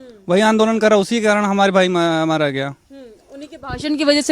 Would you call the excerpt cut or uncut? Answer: uncut